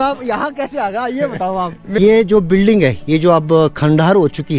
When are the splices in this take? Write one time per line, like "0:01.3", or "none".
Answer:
0:02.0